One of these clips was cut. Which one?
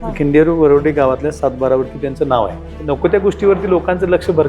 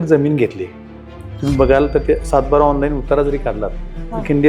first; 1 cut; at 2.7 s

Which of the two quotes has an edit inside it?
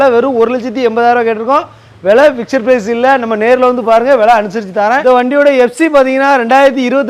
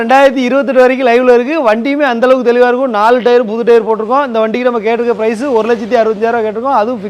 first; 1 cut; at 5.0 s

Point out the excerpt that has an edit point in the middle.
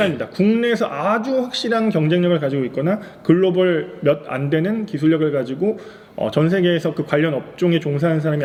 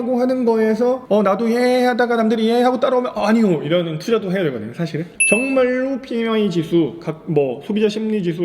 second; 2 cuts; at 1.0 s, 4.8 s

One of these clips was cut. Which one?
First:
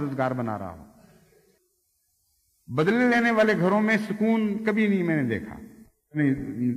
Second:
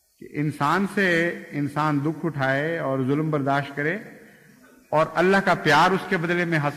first; 1 cut; at 1.6 s

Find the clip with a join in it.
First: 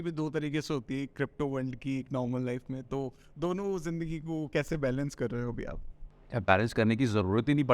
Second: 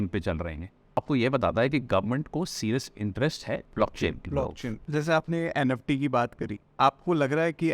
second; 4 cuts; at 1.0 s, 3.7 s, 4.8 s, 6.6 s

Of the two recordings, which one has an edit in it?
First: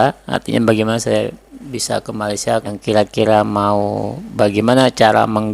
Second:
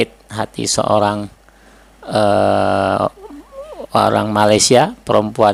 first; 1 cut; at 2.7 s

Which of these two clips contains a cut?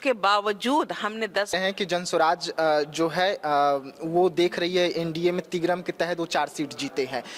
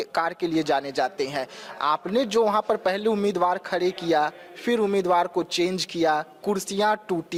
first; 1 cut; at 1.6 s

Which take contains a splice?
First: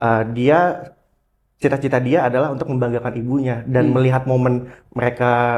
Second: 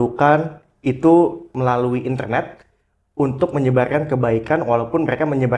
second; 1 cut; at 1.5 s

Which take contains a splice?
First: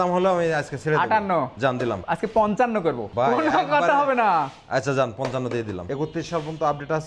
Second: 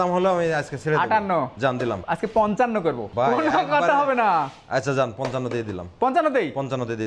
first; 1 cut; at 5.8 s

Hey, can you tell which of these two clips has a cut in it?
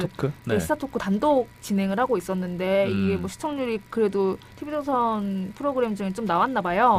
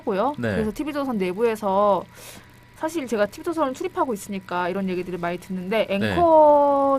second; 1 cut; at 4.3 s

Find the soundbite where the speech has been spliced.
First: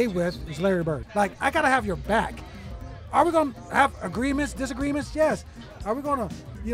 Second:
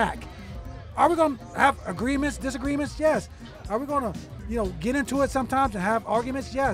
first; 1 cut; at 1.0 s

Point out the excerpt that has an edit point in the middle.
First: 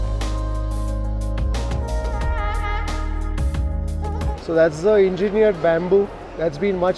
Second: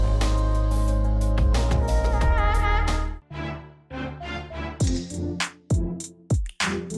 second; 1 cut; at 3.1 s

